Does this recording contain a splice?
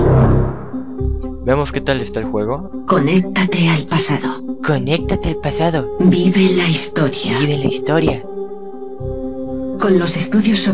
no; 0 cuts

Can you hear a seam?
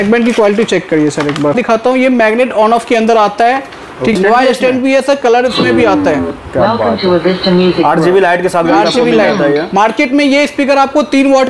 yes; 2 cuts; at 1.6 s, 4.2 s

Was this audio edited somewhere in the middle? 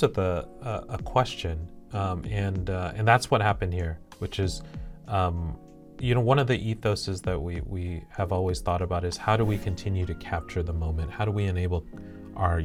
no; 0 cuts

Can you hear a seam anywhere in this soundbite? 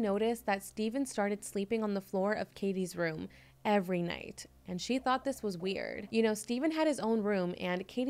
no; 0 cuts

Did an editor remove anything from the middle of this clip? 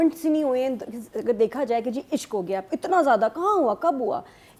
no; 0 cuts

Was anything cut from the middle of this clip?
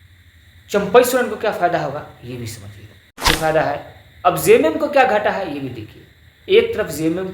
yes; 1 cut; at 3.2 s

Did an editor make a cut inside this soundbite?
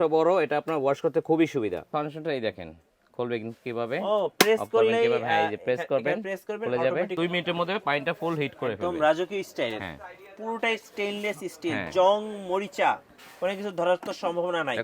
yes; 2 cuts; at 1.9 s, 7.1 s

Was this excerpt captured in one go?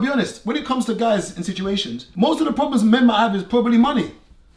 no; 1 cut; at 2.0 s

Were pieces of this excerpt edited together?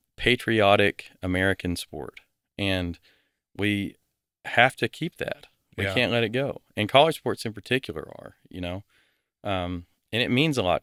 no; 0 cuts

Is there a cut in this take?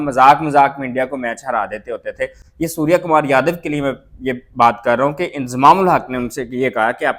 no; 0 cuts

